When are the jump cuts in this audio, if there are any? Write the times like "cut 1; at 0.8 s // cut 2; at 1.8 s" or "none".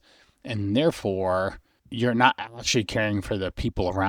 cut 1; at 1.8 s

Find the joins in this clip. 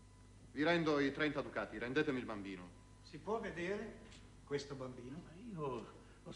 cut 1; at 3.4 s

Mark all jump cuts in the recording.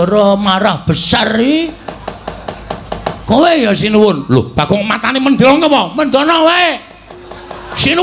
none

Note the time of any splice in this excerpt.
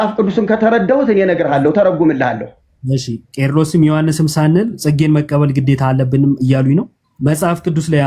cut 1; at 7.0 s

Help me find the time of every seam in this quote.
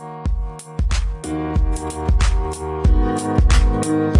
none

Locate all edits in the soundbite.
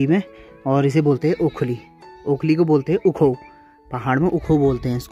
none

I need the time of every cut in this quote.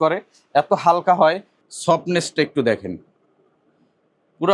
cut 1; at 1.5 s

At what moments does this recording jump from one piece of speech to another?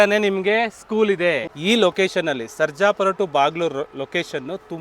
cut 1; at 1.5 s

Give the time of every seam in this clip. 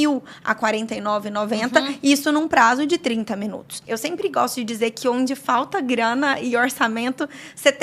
cut 1; at 3.8 s

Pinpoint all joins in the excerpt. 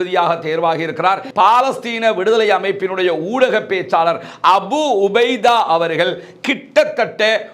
cut 1; at 1.3 s

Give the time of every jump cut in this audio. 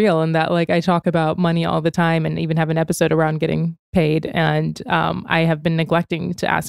none

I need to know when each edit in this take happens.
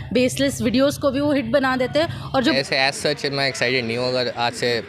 cut 1; at 2.5 s

